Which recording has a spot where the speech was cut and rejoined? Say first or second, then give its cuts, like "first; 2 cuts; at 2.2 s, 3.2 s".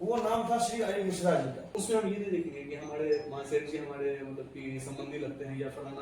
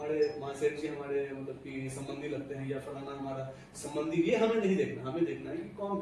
first; 1 cut; at 1.7 s